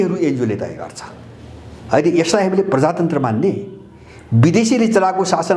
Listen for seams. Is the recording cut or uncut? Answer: uncut